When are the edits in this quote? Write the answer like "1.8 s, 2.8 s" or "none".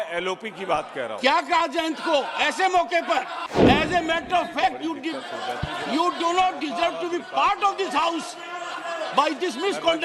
3.6 s